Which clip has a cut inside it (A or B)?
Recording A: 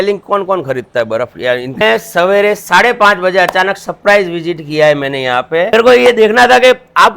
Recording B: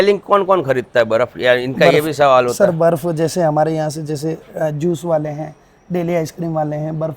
A